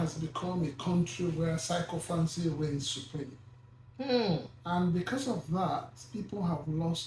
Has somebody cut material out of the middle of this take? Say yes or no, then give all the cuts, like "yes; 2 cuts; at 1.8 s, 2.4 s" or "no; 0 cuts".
no; 0 cuts